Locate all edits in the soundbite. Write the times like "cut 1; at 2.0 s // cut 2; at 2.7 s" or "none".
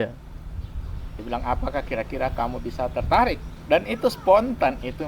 cut 1; at 3.5 s